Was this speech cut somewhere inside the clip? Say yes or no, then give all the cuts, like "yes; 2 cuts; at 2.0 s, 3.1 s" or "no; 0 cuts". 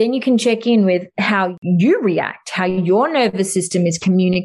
yes; 1 cut; at 1.6 s